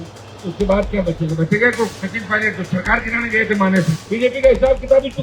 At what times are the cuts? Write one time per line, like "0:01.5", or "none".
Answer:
0:01.9
0:04.0